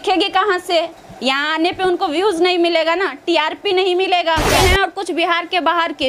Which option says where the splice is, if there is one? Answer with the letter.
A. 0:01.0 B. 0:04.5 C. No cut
B